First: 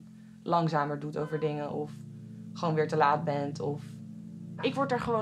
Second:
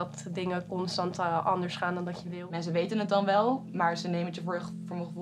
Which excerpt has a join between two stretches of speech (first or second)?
second